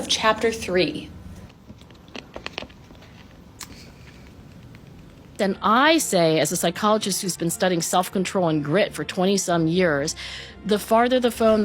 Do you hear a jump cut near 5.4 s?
yes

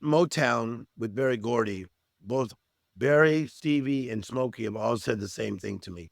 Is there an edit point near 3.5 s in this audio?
yes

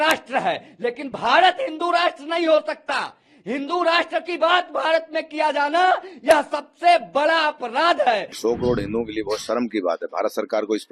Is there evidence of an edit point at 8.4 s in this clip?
yes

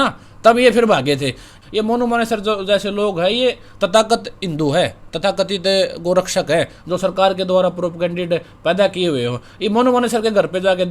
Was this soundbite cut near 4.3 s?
no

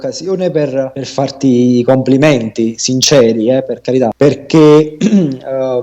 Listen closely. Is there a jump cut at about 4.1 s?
yes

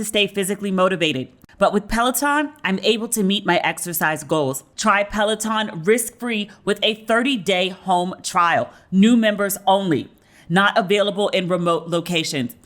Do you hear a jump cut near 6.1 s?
no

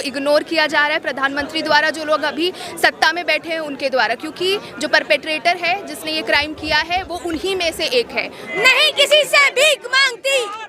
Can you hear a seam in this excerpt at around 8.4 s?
yes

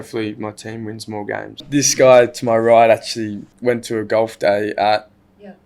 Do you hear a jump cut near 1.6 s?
yes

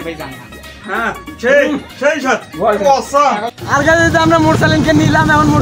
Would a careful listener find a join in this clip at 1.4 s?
no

